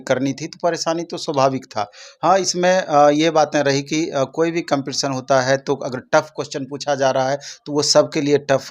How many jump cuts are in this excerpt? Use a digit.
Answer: 0